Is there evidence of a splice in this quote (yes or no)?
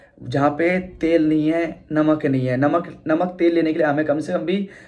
no